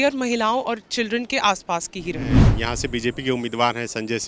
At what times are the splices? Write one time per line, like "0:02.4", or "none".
0:02.4